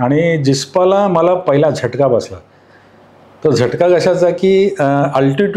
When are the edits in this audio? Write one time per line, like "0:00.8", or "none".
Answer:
none

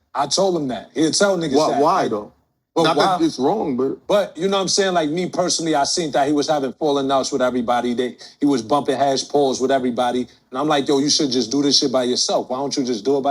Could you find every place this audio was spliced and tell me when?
none

